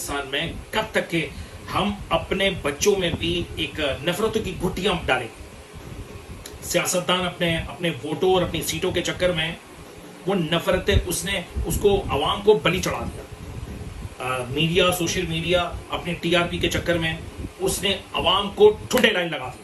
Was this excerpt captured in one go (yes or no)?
yes